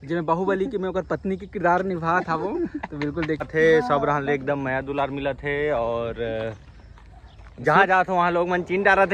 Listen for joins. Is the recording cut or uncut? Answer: cut